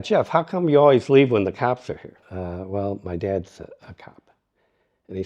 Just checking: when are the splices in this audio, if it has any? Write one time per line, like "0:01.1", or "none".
0:02.2